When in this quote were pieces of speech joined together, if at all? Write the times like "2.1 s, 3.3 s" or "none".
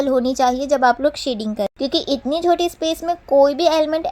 1.7 s